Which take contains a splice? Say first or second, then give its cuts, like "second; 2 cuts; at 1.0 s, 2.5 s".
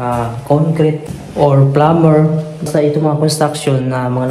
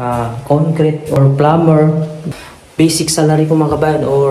second; 2 cuts; at 1.1 s, 2.4 s